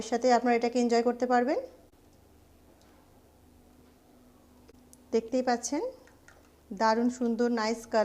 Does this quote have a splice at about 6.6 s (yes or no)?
no